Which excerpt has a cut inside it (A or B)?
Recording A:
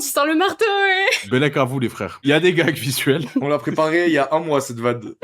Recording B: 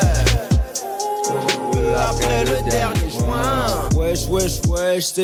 A